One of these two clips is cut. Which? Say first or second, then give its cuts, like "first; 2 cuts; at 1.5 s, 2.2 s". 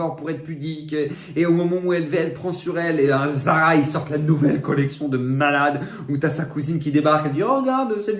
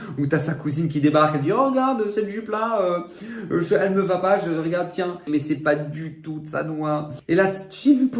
second; 2 cuts; at 5.3 s, 7.1 s